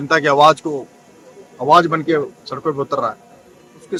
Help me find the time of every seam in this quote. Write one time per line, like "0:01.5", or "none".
none